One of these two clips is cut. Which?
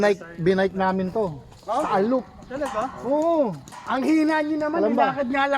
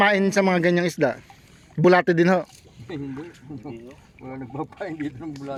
first; 1 cut; at 3.8 s

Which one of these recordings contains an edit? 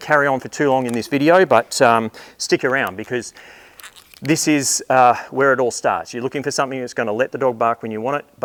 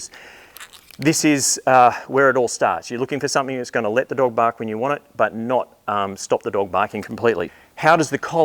second; 1 cut; at 7.5 s

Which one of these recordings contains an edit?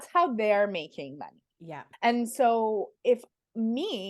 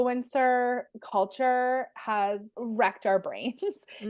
second; 2 cuts; at 0.9 s, 2.6 s

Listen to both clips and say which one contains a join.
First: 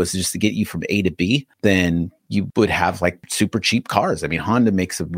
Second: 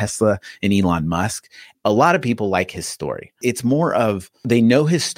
second; 2 cuts; at 1.6 s, 3.3 s

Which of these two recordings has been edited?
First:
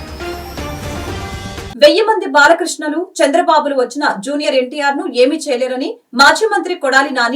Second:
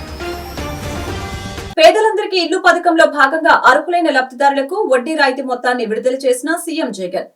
second; 1 cut; at 1.5 s

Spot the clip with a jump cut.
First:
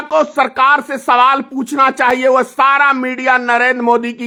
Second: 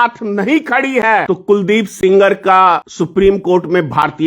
second; 2 cuts; at 1.2 s, 2.9 s

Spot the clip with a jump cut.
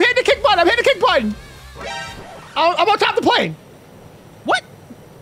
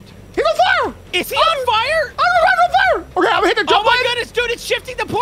first; 1 cut; at 1.5 s

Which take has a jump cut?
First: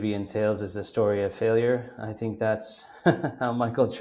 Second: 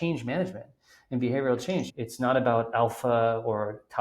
second; 1 cut; at 1.9 s

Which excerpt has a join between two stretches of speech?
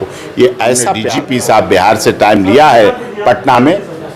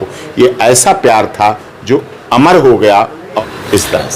first; 1 cut; at 1.0 s

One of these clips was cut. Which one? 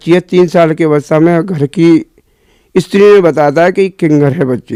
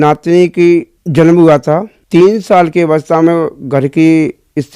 second; 2 cuts; at 1.0 s, 1.9 s

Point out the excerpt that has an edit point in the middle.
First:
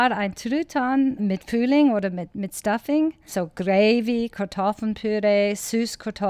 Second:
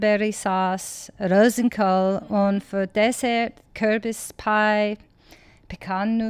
first; 2 cuts; at 1.2 s, 3.2 s

